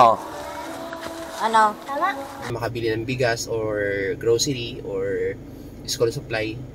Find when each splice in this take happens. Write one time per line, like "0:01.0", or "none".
0:02.6

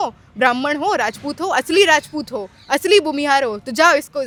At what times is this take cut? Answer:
none

